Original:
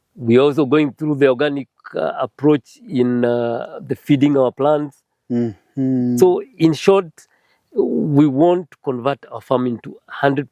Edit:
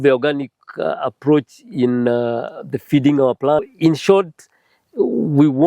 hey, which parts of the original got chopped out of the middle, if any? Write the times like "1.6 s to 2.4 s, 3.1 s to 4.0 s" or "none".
4.8 s to 6.4 s